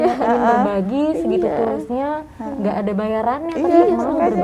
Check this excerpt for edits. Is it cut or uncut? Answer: uncut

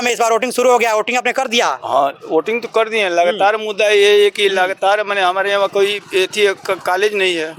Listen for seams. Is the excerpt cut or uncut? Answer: uncut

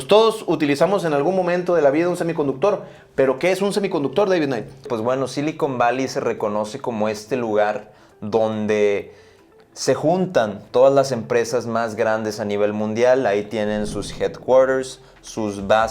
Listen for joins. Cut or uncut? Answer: cut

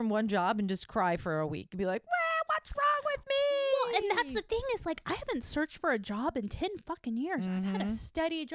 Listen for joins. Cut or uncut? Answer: uncut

